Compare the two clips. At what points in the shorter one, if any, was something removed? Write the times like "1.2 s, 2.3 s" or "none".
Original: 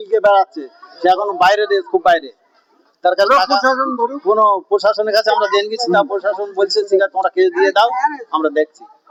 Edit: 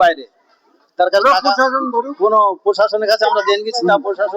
none

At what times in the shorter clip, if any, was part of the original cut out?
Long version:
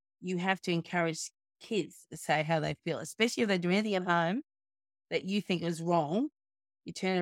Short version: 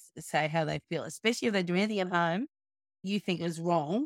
3.0 s

